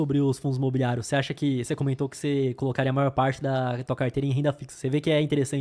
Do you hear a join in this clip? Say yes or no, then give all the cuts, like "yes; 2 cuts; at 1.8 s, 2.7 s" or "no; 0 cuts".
no; 0 cuts